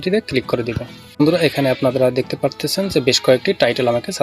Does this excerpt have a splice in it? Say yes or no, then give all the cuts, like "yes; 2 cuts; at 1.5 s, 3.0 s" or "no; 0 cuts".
yes; 1 cut; at 1.2 s